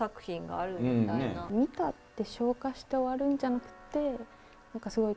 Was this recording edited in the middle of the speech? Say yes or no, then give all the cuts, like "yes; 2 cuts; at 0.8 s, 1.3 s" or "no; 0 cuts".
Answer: yes; 1 cut; at 1.5 s